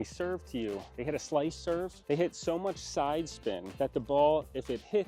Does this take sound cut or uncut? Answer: uncut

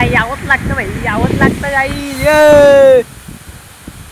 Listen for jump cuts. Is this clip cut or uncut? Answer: uncut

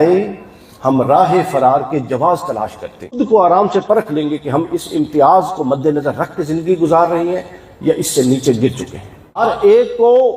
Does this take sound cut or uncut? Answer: cut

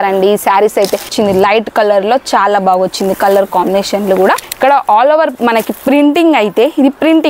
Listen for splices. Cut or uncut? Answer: cut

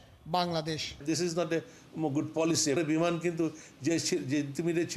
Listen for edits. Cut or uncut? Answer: cut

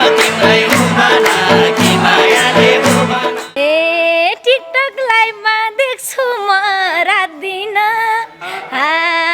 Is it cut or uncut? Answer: cut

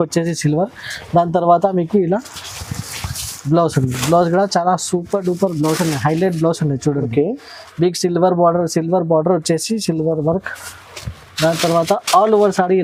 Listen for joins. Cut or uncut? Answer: uncut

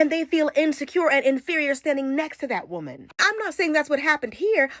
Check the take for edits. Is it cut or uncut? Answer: uncut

